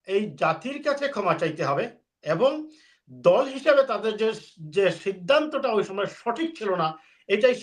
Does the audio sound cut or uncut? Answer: uncut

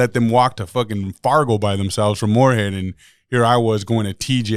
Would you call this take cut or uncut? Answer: uncut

